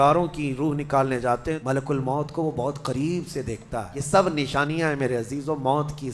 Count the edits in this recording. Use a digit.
2